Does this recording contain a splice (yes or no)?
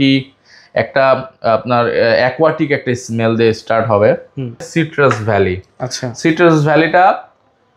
yes